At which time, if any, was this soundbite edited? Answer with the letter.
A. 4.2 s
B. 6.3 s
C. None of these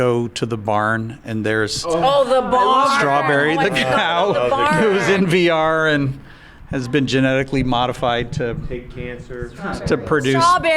C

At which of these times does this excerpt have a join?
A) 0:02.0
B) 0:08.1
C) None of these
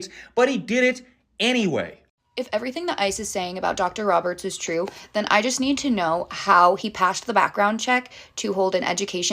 A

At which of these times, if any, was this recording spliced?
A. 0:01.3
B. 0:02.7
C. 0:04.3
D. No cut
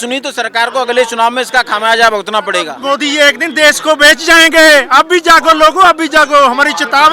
B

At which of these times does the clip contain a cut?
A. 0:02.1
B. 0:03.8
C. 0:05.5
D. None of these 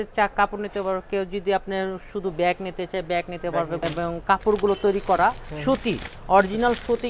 B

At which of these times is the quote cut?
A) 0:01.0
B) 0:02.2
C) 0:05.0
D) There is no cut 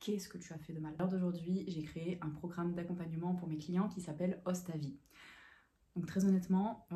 A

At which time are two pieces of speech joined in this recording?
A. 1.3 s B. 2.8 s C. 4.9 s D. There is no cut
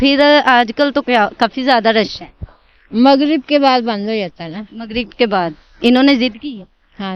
D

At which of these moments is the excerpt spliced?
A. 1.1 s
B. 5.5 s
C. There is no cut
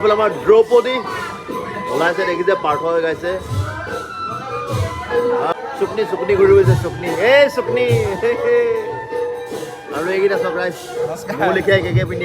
B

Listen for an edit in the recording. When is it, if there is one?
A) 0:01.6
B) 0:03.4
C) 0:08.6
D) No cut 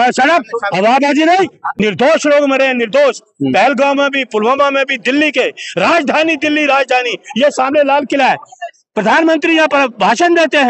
A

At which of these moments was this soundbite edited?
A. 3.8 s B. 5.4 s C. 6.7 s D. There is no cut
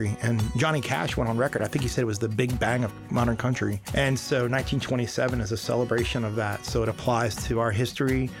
A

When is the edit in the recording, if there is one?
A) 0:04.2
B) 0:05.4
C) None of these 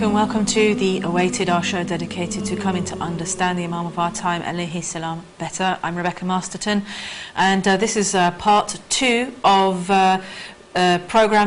A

